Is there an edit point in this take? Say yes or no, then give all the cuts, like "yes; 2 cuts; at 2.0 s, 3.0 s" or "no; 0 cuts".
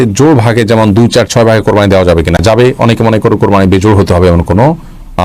no; 0 cuts